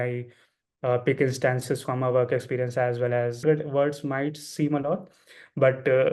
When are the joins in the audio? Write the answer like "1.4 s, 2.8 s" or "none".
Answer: 3.4 s